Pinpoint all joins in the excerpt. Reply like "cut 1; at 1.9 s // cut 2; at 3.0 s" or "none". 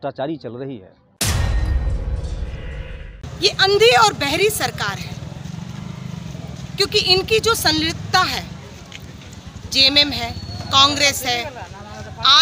cut 1; at 3.2 s